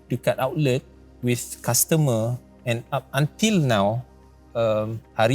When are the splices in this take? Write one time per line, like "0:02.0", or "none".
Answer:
none